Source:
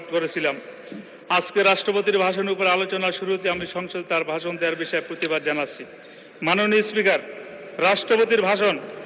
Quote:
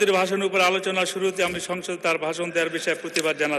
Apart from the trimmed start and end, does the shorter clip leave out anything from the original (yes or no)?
no